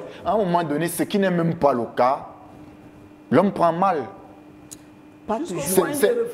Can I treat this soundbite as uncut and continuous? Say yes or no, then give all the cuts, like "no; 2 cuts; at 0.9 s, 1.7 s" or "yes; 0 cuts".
yes; 0 cuts